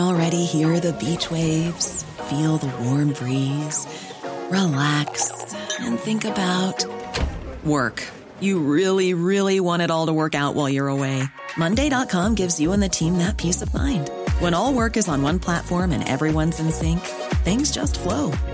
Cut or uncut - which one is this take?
uncut